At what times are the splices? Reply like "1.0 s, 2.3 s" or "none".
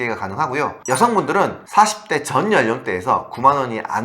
1.6 s